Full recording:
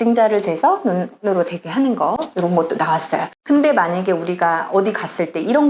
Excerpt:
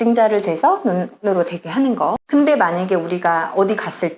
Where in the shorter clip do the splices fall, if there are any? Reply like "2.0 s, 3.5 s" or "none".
2.2 s

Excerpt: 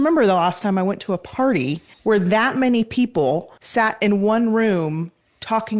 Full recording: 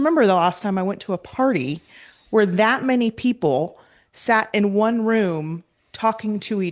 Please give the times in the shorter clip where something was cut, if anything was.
1.9 s, 3.5 s

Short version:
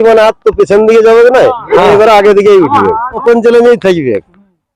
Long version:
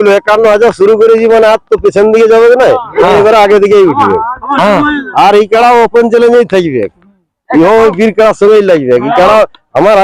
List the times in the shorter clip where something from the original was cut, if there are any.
3.2 s

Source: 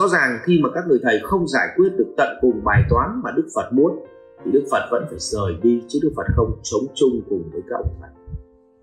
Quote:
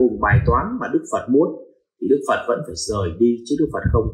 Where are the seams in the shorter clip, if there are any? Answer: none

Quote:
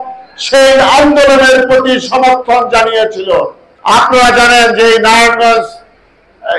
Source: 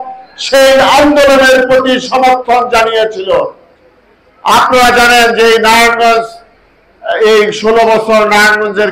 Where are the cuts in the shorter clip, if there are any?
3.6 s

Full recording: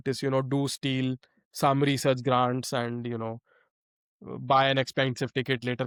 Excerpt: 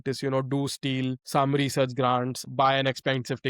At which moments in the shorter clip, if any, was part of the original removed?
1.2 s, 2.4 s

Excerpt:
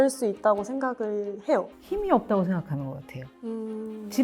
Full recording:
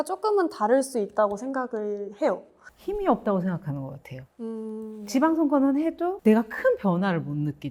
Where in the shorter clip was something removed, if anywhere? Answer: 1.8 s

